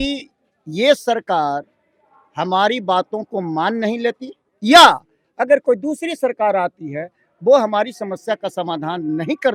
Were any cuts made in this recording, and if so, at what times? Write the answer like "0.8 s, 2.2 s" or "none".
none